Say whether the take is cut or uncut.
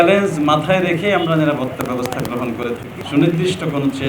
cut